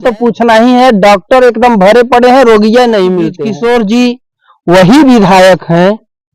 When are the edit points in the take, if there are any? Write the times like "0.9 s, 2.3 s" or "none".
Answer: 3.4 s